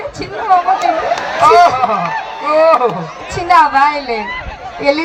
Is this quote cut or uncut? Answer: uncut